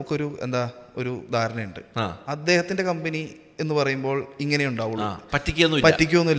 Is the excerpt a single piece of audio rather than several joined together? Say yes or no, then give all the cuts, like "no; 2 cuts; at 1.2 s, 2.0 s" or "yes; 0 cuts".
yes; 0 cuts